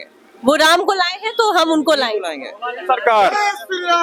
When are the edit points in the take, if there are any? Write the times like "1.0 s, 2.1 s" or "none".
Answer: none